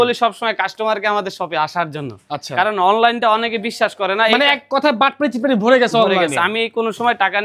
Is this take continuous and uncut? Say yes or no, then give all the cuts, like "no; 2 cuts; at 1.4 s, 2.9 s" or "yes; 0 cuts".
yes; 0 cuts